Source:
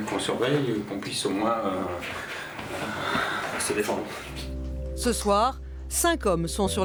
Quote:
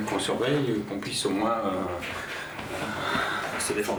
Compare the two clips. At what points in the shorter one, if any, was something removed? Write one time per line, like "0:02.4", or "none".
none